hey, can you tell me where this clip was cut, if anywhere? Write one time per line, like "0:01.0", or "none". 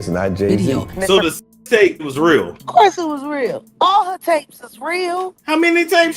0:00.9